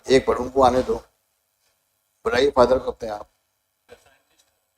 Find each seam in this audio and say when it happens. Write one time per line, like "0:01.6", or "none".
0:03.9